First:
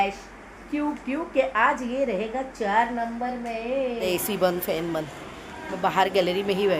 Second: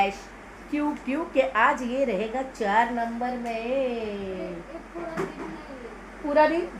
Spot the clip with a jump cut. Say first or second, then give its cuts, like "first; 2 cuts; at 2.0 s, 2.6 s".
first; 1 cut; at 4.1 s